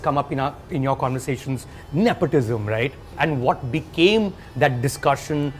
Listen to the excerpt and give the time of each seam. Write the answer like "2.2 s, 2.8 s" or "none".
1.7 s, 3.2 s